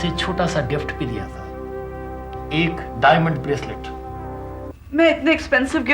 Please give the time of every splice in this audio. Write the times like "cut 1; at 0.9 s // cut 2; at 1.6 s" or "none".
cut 1; at 4.7 s